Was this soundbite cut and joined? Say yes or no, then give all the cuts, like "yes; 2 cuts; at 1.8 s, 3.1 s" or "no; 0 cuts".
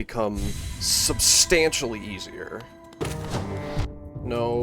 yes; 1 cut; at 3.0 s